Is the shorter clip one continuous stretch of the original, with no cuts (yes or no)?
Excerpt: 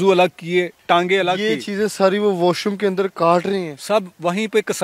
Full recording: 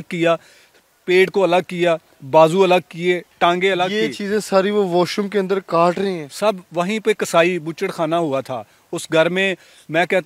yes